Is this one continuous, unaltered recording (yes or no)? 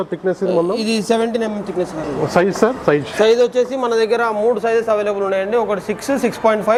yes